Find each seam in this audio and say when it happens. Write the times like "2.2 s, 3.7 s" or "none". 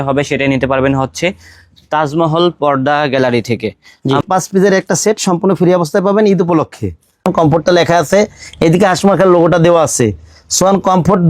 4.2 s, 7.3 s